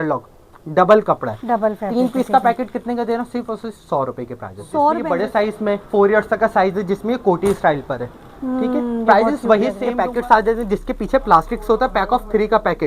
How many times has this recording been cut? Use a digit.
2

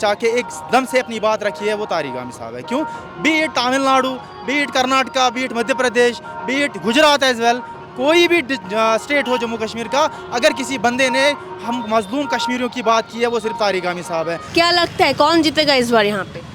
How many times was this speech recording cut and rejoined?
1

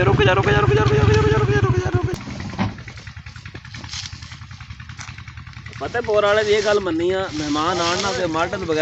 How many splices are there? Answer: 1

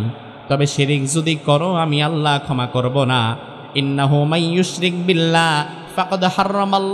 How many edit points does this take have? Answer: 0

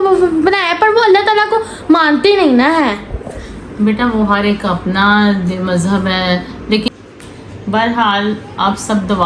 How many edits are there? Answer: 1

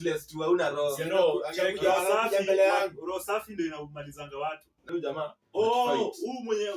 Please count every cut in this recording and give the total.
1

